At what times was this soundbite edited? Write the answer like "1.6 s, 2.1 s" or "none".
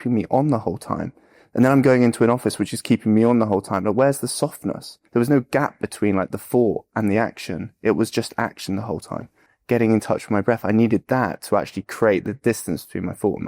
5.0 s, 9.5 s